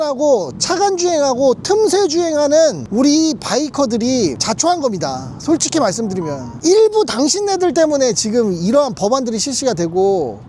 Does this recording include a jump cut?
yes; 3 cuts; at 2.8 s, 4.4 s, 6.5 s

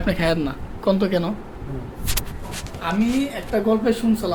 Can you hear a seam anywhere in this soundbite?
no; 0 cuts

